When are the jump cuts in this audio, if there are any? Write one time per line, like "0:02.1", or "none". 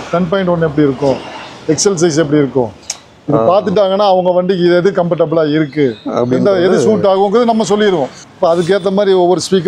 0:08.2